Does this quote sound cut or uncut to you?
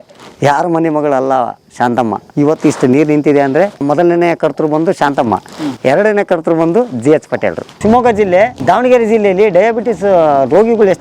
cut